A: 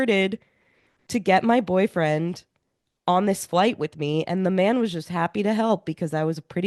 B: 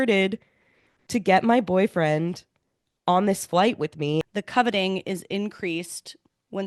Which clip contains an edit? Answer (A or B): B